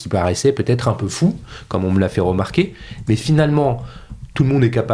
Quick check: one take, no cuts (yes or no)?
yes